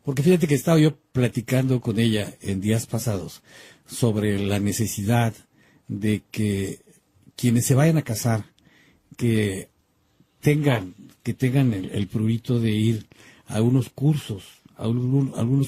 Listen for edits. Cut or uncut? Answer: cut